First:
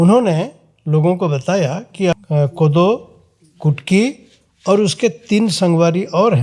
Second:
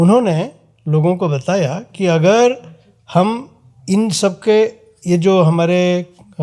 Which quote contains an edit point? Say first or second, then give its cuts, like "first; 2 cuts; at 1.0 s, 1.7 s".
first; 1 cut; at 2.1 s